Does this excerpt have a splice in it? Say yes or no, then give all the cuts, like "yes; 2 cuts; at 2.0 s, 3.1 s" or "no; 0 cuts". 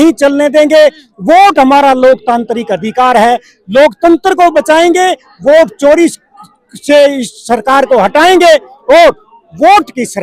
no; 0 cuts